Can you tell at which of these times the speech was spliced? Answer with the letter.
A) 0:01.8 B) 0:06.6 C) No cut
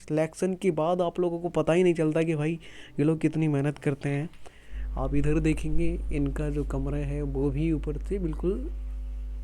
C